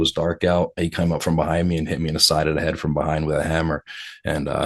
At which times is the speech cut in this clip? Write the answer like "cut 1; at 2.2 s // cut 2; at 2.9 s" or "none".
none